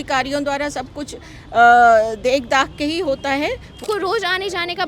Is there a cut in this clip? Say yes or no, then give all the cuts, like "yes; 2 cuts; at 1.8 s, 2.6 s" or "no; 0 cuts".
yes; 1 cut; at 3.8 s